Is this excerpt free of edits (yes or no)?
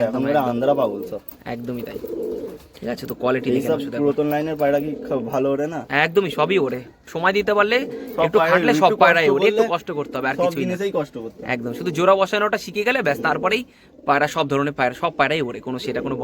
yes